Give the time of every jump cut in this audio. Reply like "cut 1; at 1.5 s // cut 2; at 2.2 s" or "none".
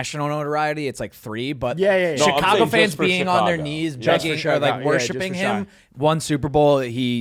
none